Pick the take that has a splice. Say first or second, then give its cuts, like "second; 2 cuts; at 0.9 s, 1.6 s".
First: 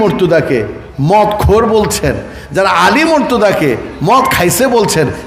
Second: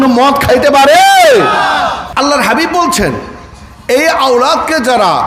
second; 1 cut; at 2.0 s